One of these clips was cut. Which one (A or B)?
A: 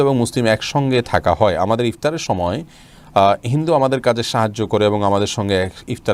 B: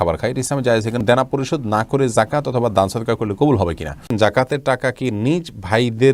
B